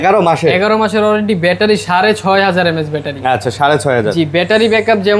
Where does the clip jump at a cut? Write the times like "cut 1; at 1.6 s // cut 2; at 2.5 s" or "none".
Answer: none